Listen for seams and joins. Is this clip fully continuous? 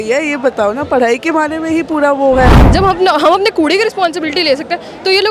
no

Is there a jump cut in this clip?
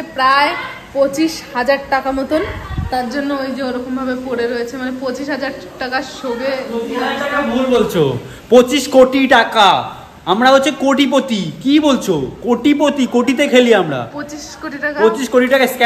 no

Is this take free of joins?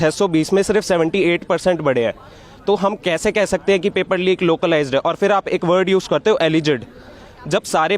yes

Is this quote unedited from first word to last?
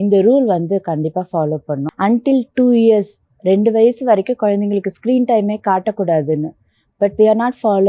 no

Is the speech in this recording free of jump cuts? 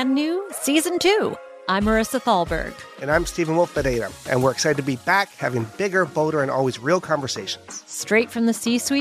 yes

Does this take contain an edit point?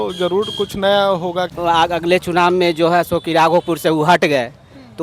yes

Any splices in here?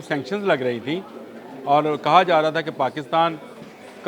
no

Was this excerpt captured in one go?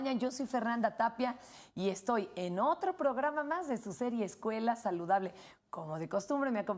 no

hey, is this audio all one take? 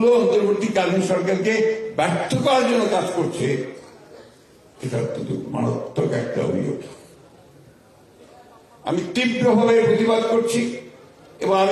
yes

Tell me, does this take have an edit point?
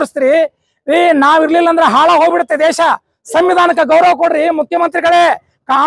no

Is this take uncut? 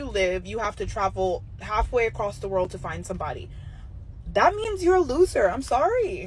no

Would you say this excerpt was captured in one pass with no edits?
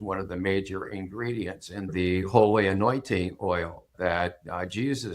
no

